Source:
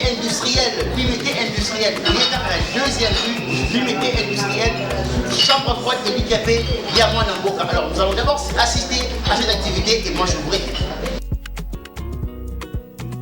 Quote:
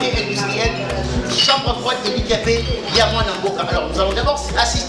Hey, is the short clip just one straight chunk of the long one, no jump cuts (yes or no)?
yes